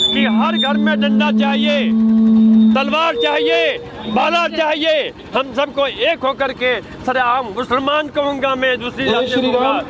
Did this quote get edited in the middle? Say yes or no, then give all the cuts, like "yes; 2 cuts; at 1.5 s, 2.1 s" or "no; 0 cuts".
no; 0 cuts